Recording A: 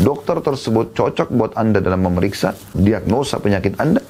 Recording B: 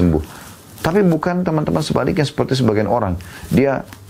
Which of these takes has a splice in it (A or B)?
A